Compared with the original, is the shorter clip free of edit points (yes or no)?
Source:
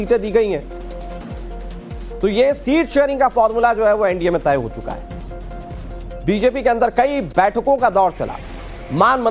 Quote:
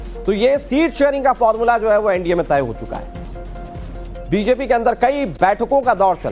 yes